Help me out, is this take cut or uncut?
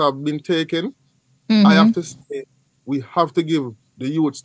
uncut